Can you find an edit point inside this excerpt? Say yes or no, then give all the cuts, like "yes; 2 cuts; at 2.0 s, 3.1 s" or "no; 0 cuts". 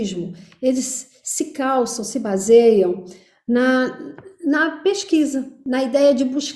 yes; 1 cut; at 5.5 s